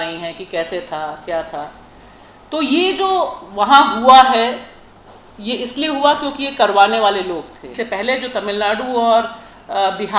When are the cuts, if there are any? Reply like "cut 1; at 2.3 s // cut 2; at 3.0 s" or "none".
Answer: cut 1; at 7.7 s